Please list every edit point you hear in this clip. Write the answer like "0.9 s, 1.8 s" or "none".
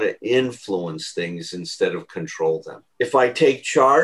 2.8 s